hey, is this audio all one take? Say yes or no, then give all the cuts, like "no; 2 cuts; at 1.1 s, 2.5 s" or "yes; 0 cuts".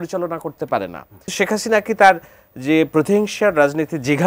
no; 1 cut; at 1.3 s